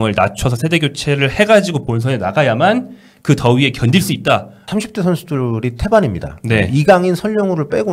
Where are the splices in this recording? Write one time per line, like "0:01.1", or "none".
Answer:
0:04.6